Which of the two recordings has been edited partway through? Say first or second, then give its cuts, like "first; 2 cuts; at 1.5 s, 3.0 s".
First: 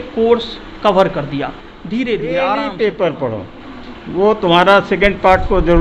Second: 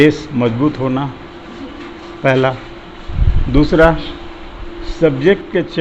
first; 1 cut; at 2.5 s